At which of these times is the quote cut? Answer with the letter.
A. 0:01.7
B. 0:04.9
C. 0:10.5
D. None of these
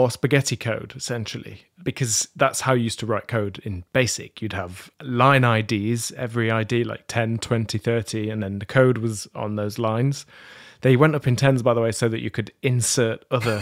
B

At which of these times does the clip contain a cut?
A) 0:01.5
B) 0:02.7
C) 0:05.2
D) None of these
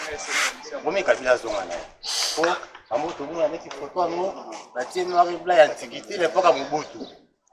D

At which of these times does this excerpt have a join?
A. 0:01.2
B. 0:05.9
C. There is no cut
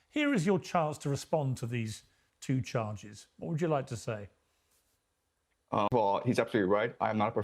B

